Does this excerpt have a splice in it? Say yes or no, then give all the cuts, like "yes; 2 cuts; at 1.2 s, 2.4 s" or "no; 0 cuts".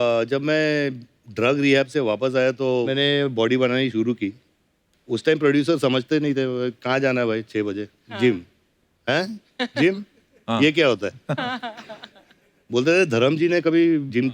no; 0 cuts